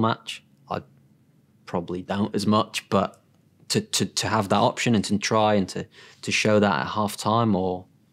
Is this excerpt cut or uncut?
uncut